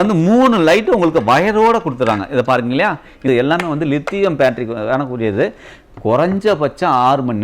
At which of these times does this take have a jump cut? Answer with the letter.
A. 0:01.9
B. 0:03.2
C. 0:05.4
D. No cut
B